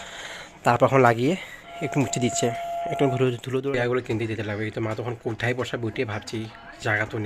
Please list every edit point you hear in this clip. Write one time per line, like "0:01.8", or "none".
0:03.5

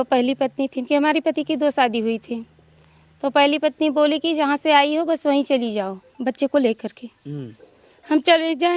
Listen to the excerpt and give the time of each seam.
none

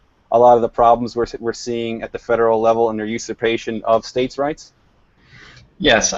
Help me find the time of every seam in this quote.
none

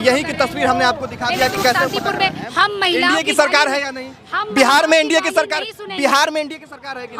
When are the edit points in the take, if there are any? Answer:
0:02.4

